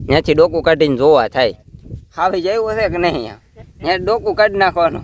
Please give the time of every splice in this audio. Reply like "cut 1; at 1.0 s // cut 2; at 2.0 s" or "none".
none